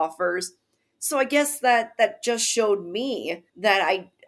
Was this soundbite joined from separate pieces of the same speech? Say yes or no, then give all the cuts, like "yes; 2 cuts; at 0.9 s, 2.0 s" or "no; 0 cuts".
no; 0 cuts